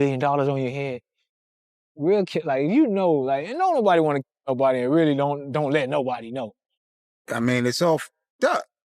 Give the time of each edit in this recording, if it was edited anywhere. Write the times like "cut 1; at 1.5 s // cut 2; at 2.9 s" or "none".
cut 1; at 6.6 s